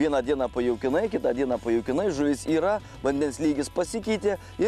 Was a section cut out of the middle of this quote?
no; 0 cuts

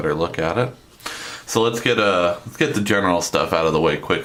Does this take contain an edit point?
no; 0 cuts

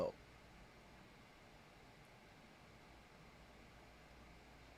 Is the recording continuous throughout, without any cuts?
yes; 0 cuts

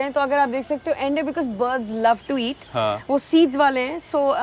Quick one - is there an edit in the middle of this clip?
no; 0 cuts

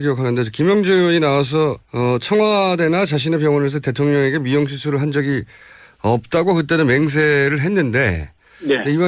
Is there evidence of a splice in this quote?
yes; 1 cut; at 1.0 s

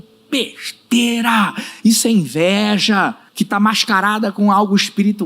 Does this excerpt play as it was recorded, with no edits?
no; 1 cut; at 3.2 s

